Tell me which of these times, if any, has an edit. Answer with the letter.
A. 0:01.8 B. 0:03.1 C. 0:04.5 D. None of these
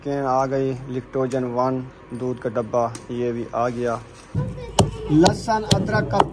C